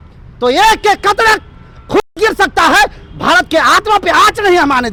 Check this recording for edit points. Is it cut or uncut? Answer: uncut